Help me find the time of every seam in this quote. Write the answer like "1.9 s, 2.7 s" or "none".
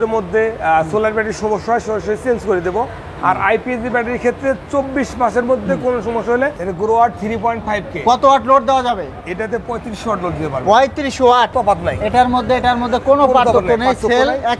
6.6 s, 11.5 s